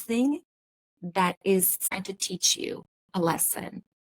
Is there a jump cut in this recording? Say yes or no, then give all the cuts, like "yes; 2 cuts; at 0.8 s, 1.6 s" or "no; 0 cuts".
yes; 1 cut; at 1.8 s